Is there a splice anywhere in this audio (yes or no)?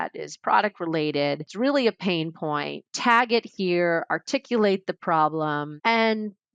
yes